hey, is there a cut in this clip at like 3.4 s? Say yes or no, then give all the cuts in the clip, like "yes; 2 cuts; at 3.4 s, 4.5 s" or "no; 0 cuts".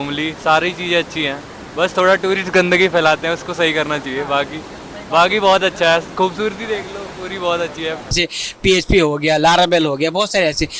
no; 1 cut; at 8.0 s